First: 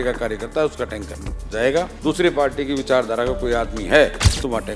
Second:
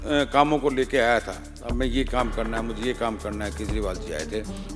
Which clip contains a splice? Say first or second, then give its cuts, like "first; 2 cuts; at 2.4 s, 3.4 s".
first; 1 cut; at 1.9 s